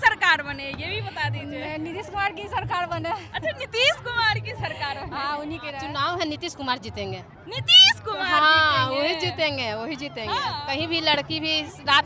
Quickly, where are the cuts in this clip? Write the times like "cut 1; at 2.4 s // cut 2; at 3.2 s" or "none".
cut 1; at 5.8 s // cut 2; at 10.5 s